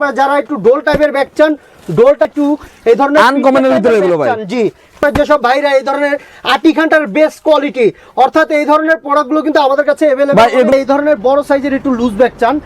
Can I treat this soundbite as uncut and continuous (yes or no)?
no